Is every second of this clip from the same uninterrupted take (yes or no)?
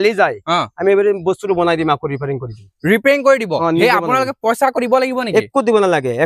yes